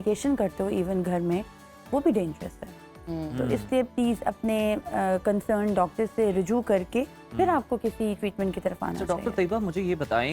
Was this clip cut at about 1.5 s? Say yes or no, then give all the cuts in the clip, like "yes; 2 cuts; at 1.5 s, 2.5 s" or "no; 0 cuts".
no; 0 cuts